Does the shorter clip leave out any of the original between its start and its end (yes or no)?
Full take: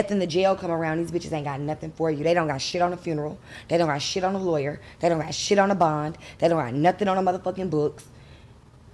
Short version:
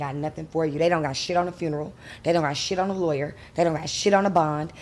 no